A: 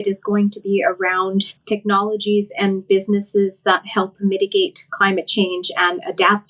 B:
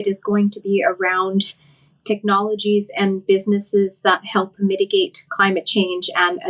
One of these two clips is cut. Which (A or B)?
A